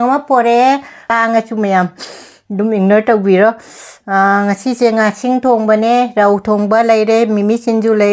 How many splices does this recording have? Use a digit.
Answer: 1